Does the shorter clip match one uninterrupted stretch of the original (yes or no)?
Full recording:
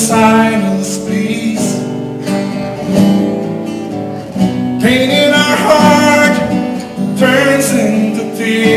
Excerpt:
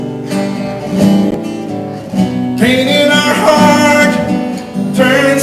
no